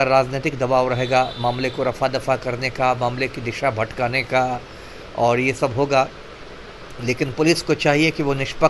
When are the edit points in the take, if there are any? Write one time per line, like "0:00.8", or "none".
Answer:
none

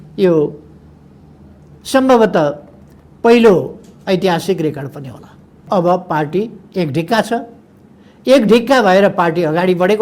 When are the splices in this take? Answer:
0:05.6

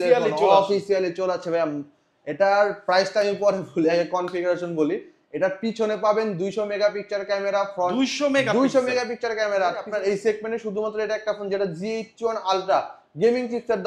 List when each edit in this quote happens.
0:09.8

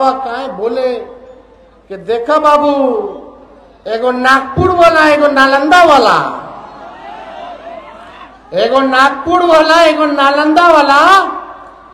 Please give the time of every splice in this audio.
none

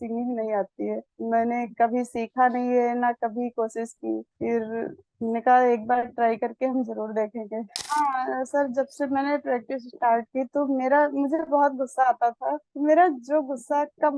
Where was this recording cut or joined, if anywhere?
0:07.8

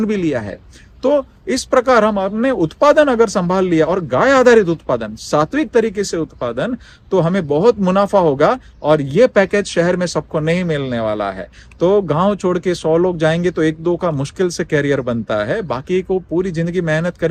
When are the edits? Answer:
none

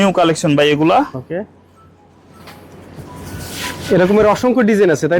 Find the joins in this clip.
none

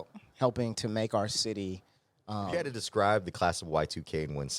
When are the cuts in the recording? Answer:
0:02.5

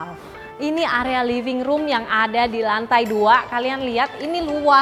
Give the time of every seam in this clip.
none

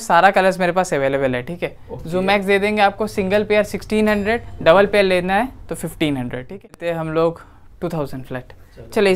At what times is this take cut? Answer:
0:06.8

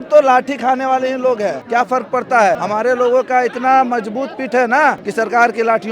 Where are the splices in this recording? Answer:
0:01.6
0:02.6
0:05.0

